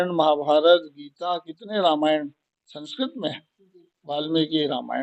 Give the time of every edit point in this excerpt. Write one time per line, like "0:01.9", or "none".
none

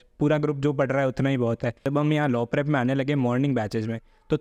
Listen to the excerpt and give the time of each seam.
0:01.9

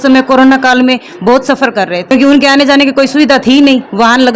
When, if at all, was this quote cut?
none

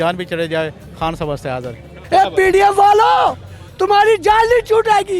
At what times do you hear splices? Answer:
0:02.0

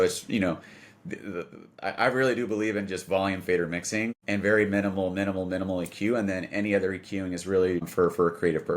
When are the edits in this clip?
0:04.2
0:07.9

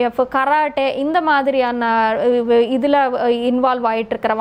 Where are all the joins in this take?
none

